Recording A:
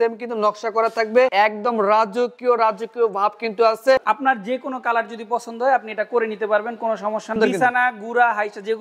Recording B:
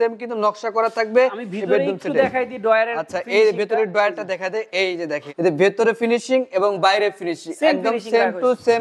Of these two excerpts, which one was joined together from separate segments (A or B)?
A